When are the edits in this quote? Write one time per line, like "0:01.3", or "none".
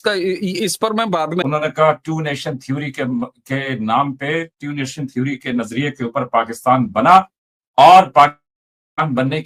0:01.4